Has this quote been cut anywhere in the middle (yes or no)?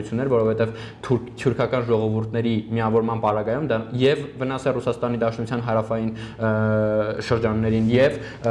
no